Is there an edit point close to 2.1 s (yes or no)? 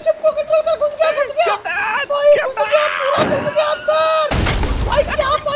yes